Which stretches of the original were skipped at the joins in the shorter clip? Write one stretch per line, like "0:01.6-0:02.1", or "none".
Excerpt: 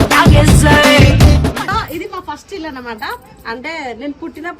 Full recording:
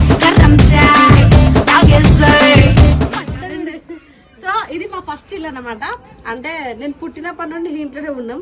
0:03.2-0:04.5